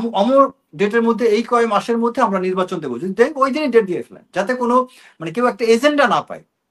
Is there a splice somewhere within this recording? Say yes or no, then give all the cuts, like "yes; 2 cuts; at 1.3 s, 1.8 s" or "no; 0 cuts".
no; 0 cuts